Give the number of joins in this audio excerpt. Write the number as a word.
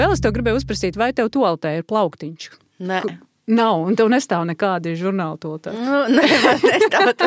zero